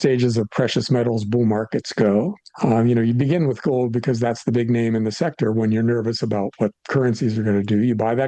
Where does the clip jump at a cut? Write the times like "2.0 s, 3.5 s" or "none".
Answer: none